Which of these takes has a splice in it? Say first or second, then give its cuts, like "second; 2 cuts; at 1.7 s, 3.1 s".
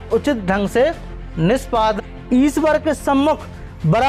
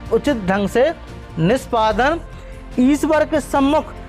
first; 1 cut; at 2.0 s